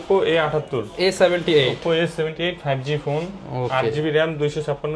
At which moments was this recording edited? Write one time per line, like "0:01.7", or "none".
none